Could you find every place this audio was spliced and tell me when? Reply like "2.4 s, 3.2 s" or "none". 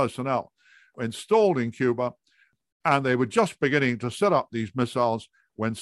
1.0 s, 2.5 s